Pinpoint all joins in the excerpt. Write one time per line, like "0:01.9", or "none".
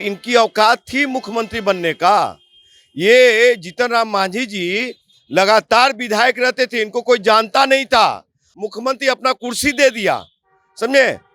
0:08.4